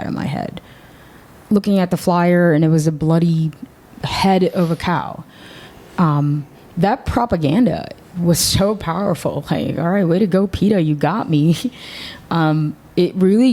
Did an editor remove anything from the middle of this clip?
no; 0 cuts

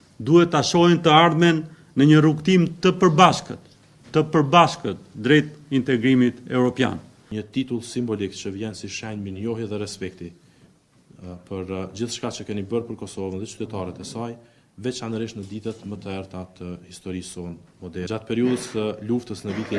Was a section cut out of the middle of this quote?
no; 0 cuts

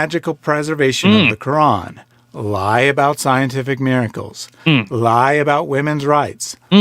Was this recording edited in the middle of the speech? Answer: no; 0 cuts

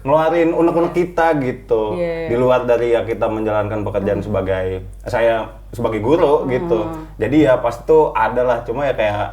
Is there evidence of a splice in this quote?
no; 0 cuts

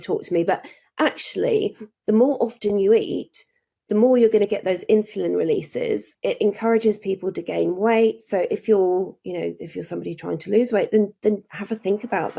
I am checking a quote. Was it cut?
yes; 1 cut; at 6.1 s

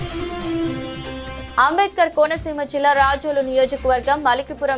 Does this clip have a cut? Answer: no; 0 cuts

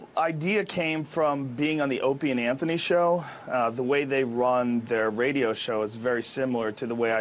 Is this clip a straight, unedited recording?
yes; 0 cuts

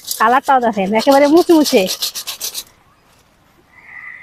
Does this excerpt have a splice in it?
no; 0 cuts

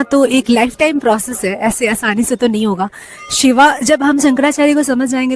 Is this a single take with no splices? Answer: yes; 0 cuts

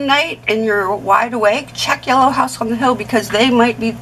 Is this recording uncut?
yes; 0 cuts

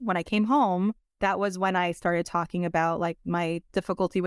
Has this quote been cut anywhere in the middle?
yes; 1 cut; at 1.1 s

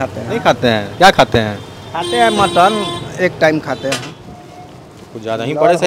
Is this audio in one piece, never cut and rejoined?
no; 1 cut; at 4.1 s

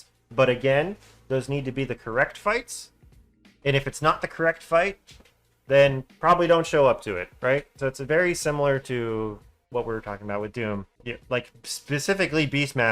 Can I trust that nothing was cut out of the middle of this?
no; 1 cut; at 10.9 s

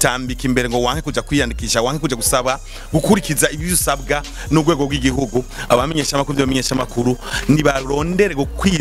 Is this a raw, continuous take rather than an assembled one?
yes; 0 cuts

